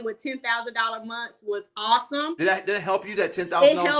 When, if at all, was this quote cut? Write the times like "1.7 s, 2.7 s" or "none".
2.3 s